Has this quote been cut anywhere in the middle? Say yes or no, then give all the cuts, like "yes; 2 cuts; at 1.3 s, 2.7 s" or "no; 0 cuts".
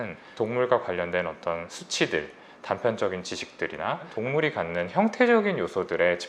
yes; 1 cut; at 4.1 s